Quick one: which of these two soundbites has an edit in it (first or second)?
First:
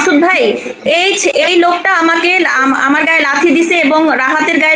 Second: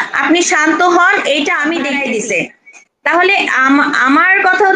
second